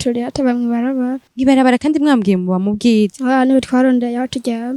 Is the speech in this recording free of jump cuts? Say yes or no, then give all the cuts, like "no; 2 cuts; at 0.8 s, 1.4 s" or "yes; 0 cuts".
no; 2 cuts; at 1.3 s, 3.2 s